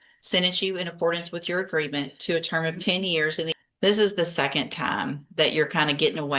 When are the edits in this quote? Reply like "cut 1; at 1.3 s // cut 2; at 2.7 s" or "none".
cut 1; at 3.6 s